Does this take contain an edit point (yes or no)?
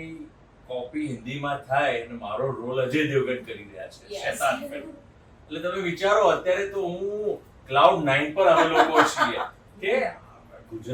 no